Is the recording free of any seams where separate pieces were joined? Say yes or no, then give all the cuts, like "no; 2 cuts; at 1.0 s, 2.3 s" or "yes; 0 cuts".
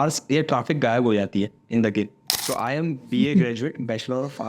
no; 1 cut; at 2.3 s